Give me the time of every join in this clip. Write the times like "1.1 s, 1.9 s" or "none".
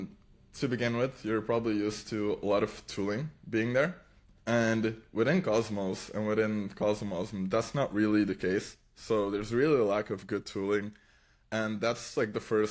none